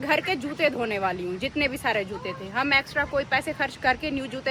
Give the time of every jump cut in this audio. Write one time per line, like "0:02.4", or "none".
none